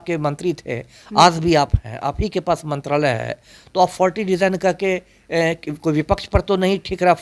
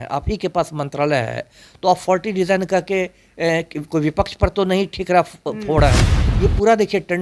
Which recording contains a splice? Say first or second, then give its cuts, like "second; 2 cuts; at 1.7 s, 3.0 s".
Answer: second; 1 cut; at 6.2 s